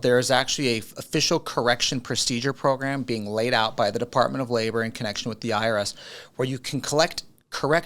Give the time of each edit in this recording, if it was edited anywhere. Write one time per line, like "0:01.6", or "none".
none